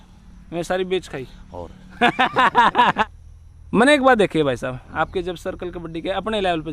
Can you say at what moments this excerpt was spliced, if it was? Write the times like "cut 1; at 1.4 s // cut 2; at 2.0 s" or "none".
cut 1; at 3.0 s